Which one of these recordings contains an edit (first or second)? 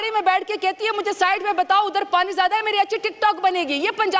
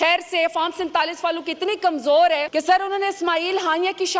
second